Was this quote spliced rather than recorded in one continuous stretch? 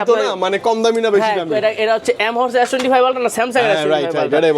no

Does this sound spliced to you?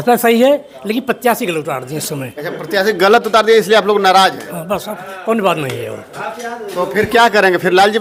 no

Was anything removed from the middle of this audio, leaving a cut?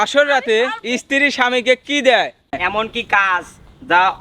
yes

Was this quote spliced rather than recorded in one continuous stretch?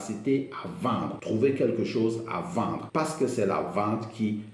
yes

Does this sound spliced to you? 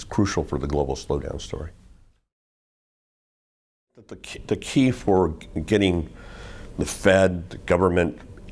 no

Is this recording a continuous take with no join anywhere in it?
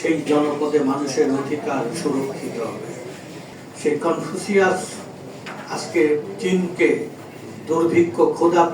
no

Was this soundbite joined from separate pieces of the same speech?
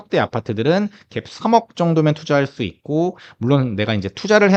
no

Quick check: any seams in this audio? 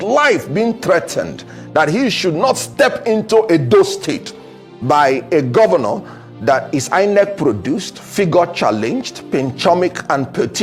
no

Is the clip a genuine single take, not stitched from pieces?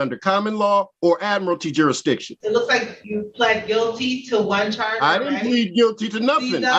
no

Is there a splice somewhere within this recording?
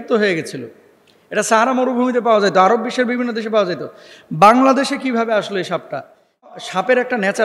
yes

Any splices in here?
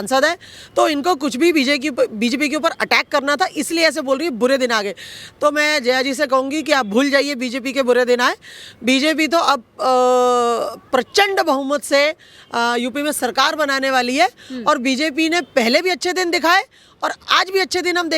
no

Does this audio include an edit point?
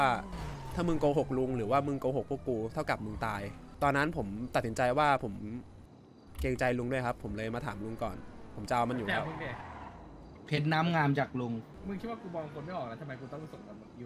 yes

